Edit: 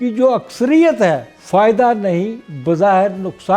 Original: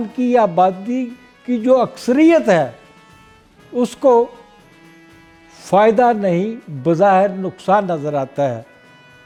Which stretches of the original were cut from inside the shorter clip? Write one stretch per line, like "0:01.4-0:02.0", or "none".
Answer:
0:02.8-0:05.5